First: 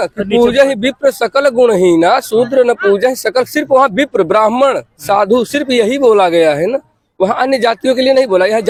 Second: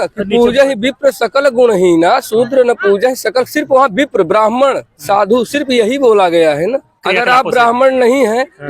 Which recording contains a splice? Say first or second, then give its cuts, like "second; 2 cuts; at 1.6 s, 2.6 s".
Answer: second; 1 cut; at 6.9 s